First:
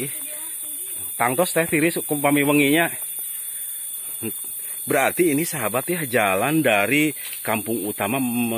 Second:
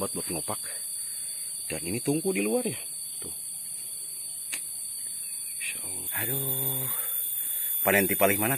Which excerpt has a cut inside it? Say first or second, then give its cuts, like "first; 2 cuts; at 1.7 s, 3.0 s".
second; 1 cut; at 6.1 s